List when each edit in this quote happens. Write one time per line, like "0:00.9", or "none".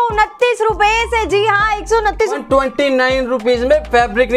0:02.4